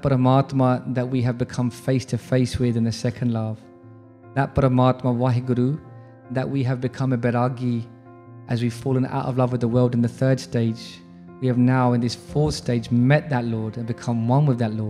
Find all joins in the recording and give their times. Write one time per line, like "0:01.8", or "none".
none